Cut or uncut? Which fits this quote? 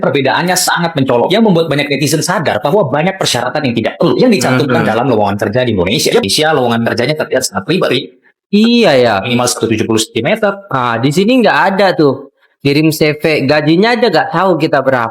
cut